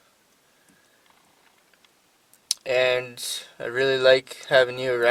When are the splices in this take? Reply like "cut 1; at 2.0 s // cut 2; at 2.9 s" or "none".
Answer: none